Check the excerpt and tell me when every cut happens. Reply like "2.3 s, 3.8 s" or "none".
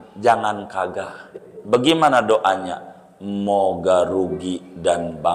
1.5 s